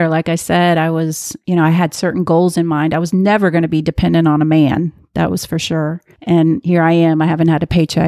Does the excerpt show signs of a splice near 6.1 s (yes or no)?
yes